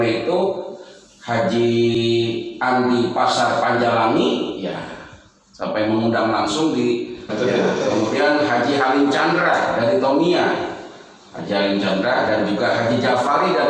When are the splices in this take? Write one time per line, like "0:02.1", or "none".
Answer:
0:01.9
0:07.3